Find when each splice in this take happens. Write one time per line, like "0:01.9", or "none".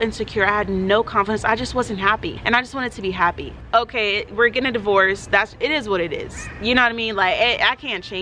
none